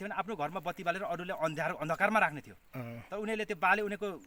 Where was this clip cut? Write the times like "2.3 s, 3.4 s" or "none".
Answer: none